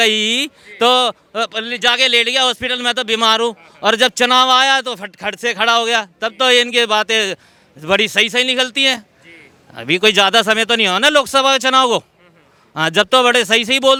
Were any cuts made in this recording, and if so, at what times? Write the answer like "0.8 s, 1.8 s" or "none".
none